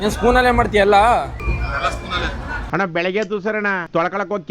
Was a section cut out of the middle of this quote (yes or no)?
yes